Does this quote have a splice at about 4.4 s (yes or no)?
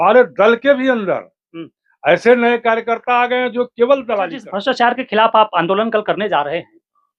yes